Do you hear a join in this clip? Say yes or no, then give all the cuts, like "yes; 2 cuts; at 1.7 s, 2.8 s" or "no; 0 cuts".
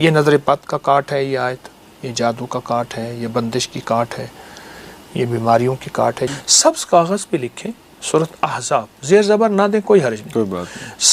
yes; 1 cut; at 6.3 s